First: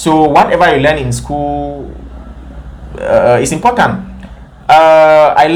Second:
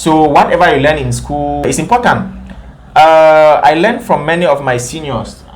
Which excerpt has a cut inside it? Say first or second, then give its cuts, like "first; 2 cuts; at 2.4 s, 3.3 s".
second; 1 cut; at 1.6 s